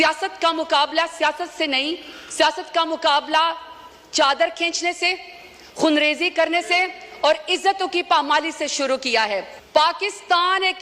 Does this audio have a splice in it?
yes; 1 cut; at 9.5 s

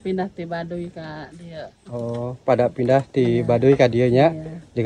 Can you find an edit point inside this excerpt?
no; 0 cuts

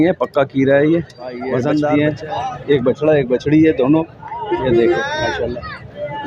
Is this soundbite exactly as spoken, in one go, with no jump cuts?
no; 1 cut; at 1.9 s

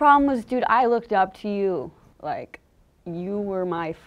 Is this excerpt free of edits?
no; 1 cut; at 2.0 s

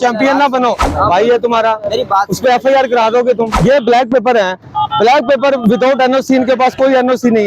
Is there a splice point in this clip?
yes; 2 cuts; at 0.8 s, 3.5 s

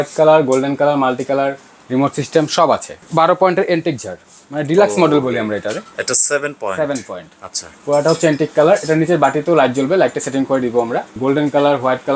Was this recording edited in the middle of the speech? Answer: yes; 3 cuts; at 3.0 s, 5.9 s, 11.1 s

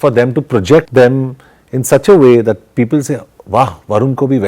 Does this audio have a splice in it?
yes; 1 cut; at 1.4 s

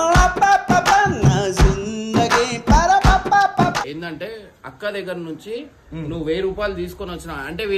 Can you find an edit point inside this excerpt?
yes; 1 cut; at 3.9 s

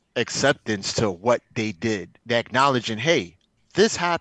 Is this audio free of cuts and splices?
no; 1 cut; at 2.1 s

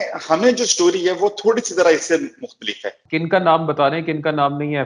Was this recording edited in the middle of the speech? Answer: yes; 1 cut; at 3.0 s

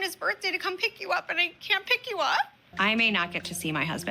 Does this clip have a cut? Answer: yes; 1 cut; at 2.6 s

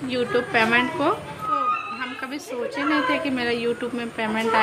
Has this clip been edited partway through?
no; 0 cuts

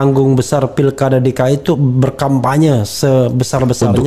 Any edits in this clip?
no; 0 cuts

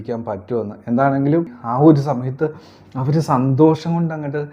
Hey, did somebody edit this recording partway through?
yes; 1 cut; at 1.6 s

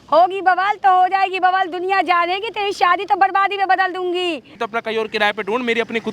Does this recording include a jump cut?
yes; 1 cut; at 4.6 s

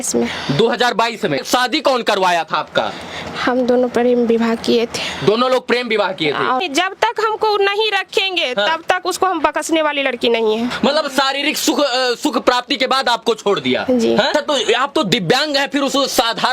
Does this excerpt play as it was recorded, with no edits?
no; 4 cuts; at 1.4 s, 6.6 s, 10.7 s, 14.3 s

